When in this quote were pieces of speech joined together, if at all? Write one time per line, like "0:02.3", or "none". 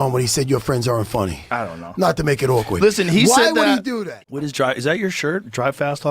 0:04.0

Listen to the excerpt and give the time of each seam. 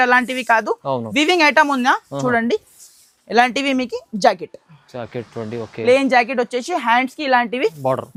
none

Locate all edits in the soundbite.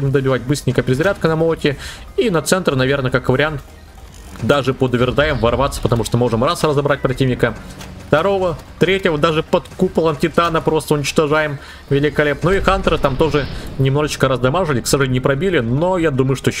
none

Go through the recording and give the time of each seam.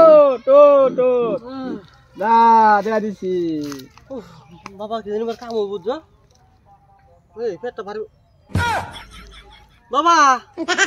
none

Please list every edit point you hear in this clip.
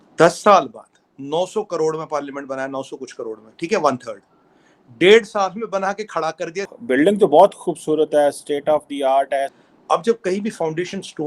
0:06.7
0:09.5

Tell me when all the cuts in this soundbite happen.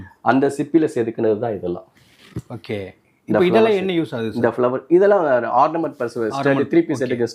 none

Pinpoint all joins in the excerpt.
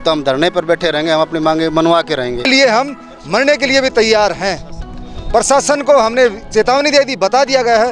0:02.5

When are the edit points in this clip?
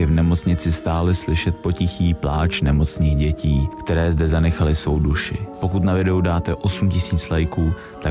none

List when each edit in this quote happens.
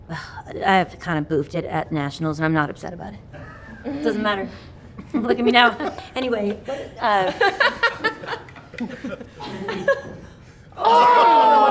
0:06.0

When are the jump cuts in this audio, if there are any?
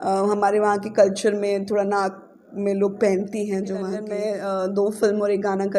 0:04.0

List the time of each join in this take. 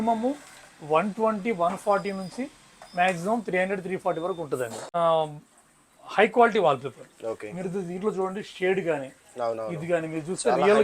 0:04.9

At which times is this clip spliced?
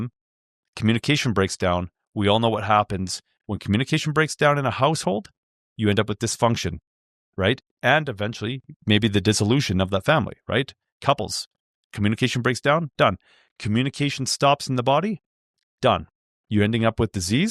none

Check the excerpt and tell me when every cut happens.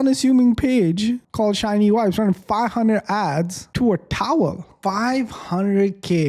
0:04.7

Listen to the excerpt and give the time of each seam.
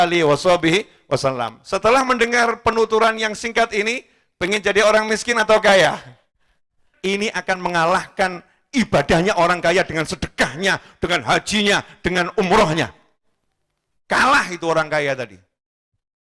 0:06.8

